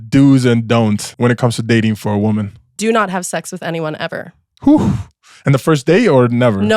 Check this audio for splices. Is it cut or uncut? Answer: cut